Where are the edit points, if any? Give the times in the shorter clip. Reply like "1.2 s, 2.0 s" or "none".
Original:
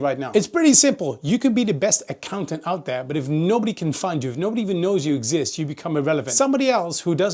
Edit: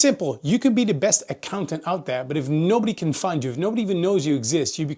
none